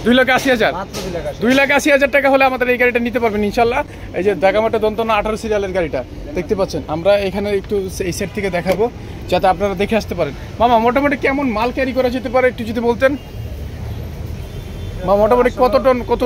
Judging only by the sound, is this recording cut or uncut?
uncut